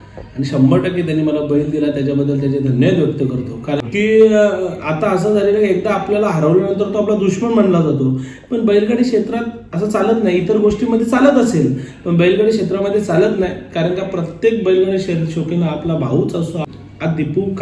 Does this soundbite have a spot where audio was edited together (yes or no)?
yes